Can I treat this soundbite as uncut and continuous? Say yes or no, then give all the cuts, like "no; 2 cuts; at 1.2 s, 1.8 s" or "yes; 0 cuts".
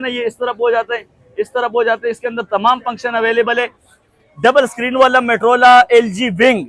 yes; 0 cuts